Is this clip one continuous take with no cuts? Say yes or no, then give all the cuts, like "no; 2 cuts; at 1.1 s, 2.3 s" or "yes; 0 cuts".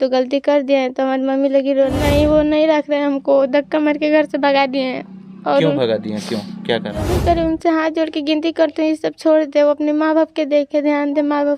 no; 2 cuts; at 2.0 s, 7.1 s